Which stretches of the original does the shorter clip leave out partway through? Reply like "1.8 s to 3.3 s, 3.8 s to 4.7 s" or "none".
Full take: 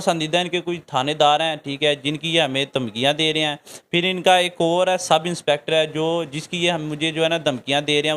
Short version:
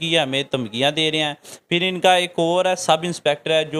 none